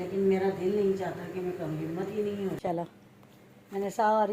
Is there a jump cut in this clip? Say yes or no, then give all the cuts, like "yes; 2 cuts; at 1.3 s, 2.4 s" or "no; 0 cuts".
yes; 1 cut; at 2.6 s